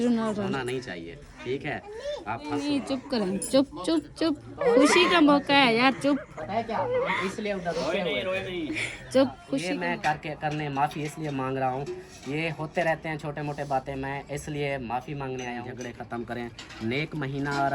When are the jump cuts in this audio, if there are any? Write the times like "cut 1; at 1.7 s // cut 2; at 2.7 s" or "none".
cut 1; at 2.6 s // cut 2; at 9.7 s // cut 3; at 15.7 s